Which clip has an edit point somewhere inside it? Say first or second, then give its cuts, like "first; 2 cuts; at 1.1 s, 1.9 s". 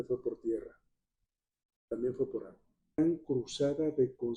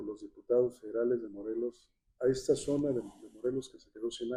first; 1 cut; at 3.0 s